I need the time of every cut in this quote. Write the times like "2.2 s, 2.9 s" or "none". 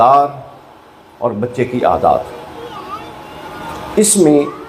none